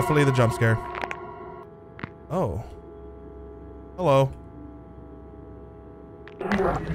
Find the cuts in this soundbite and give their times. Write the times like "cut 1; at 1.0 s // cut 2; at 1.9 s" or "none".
none